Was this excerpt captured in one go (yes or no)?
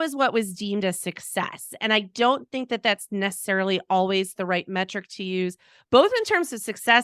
yes